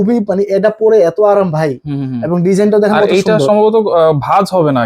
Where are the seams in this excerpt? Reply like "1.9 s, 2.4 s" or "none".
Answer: none